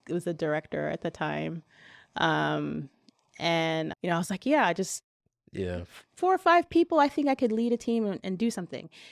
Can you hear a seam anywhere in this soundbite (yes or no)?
no